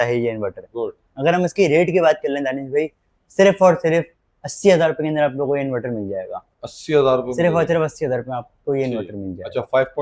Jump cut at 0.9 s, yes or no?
no